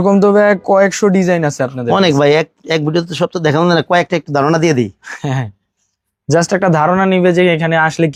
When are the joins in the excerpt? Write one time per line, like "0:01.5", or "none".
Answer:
none